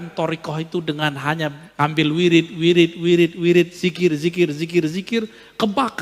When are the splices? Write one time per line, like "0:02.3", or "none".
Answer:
0:01.6